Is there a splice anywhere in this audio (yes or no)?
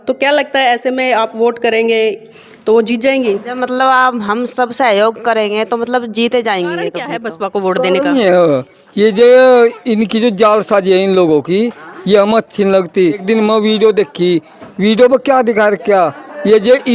yes